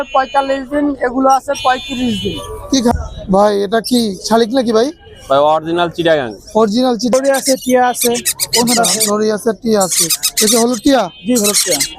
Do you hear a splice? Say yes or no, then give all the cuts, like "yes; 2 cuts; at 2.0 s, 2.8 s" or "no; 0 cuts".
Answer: yes; 2 cuts; at 2.9 s, 7.1 s